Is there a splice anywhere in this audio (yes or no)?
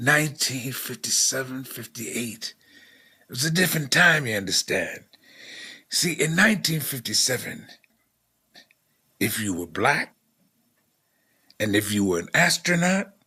no